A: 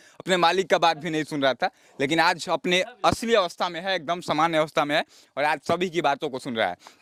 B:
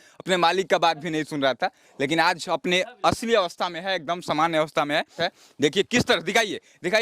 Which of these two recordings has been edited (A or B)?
B